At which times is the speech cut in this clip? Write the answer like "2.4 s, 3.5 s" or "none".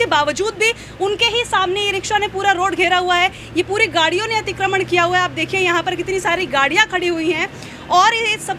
none